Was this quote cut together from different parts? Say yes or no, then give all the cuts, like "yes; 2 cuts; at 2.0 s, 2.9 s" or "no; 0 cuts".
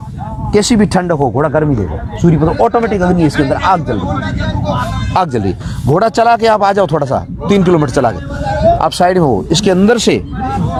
no; 0 cuts